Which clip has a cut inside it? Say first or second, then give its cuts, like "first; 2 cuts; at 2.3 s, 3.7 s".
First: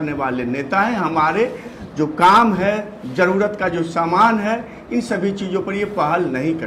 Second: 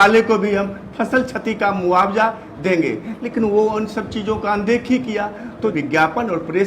second; 1 cut; at 5.7 s